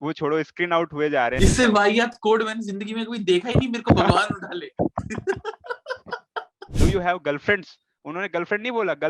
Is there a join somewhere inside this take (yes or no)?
yes